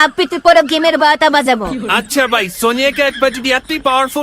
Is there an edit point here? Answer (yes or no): yes